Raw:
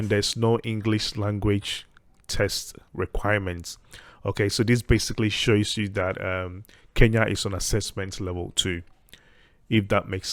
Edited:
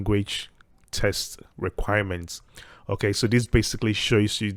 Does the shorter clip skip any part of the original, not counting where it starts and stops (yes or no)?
no